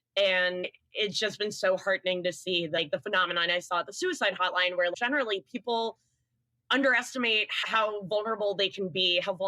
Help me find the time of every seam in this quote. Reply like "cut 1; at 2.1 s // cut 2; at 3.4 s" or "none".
cut 1; at 2.8 s // cut 2; at 4.9 s // cut 3; at 7.5 s